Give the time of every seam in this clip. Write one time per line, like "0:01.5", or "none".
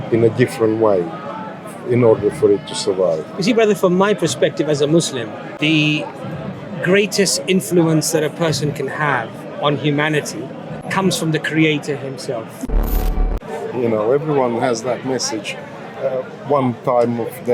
0:05.5
0:10.8
0:13.0